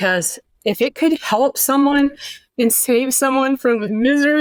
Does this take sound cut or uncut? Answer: uncut